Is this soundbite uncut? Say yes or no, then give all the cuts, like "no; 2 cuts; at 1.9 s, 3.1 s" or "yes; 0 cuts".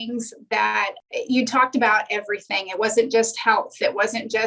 no; 1 cut; at 1.0 s